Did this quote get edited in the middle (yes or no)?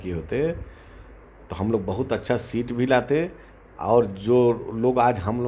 no